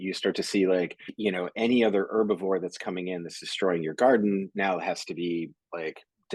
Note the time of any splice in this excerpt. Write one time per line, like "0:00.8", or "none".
0:01.0

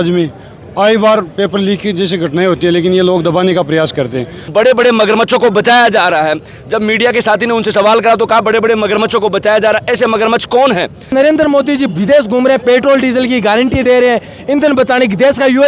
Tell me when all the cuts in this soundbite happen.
0:04.4
0:11.1

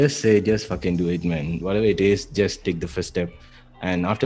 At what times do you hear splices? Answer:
0:01.6

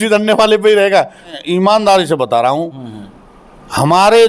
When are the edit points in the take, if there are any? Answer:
0:01.3

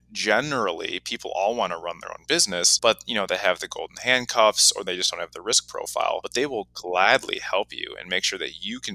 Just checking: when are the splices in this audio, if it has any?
0:02.7
0:06.3

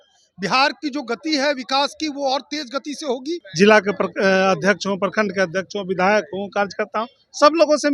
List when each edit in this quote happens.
0:03.4

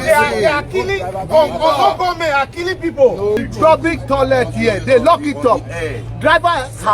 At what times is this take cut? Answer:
0:03.4

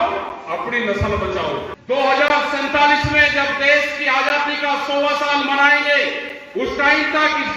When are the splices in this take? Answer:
0:01.7

